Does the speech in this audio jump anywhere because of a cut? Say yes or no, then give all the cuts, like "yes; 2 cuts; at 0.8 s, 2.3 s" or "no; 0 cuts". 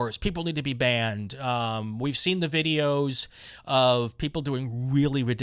no; 0 cuts